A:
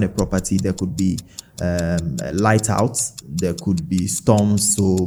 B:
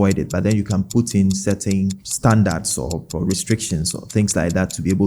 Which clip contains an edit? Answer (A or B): B